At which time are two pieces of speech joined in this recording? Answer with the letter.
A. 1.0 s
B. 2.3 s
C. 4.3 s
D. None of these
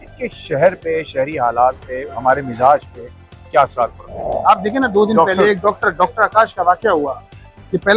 C